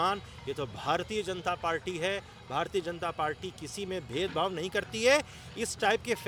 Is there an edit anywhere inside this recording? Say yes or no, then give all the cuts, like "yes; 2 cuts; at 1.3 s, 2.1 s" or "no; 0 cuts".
no; 0 cuts